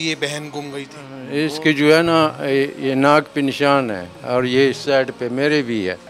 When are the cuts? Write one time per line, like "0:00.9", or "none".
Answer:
0:01.2